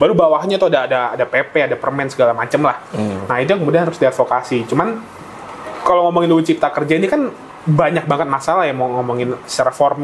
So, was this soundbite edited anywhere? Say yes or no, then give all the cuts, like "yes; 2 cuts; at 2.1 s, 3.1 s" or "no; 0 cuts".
no; 0 cuts